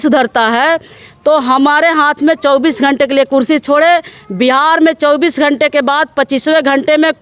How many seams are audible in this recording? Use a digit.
0